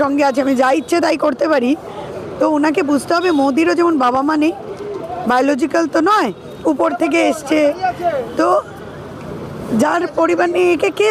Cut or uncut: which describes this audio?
uncut